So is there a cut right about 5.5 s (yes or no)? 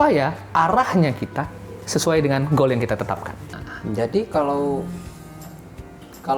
no